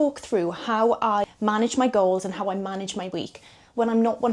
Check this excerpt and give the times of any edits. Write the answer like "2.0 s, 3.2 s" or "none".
1.2 s